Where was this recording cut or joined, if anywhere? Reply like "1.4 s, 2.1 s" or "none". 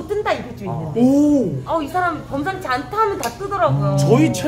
1.6 s